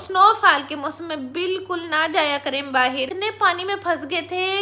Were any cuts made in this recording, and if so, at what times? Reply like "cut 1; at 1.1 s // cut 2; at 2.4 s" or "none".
cut 1; at 3.1 s